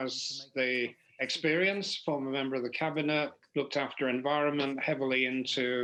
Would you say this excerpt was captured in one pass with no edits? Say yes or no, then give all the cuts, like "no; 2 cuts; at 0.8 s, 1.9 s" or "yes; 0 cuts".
yes; 0 cuts